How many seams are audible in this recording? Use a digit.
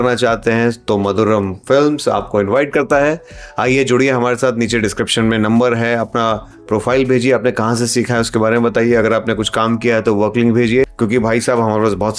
0